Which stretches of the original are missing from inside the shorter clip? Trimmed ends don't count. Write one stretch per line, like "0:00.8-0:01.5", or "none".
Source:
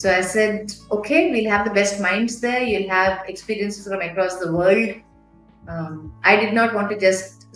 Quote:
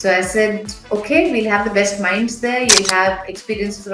none